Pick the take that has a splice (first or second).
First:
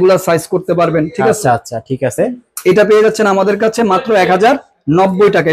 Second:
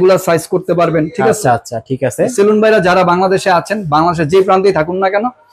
second